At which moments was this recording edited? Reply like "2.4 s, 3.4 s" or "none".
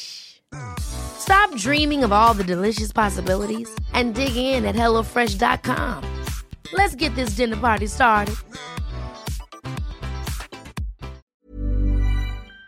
11.2 s